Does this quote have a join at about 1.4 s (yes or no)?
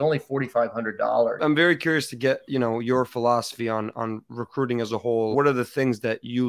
yes